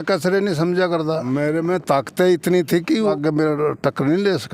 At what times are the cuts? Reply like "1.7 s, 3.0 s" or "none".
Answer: 1.2 s, 3.1 s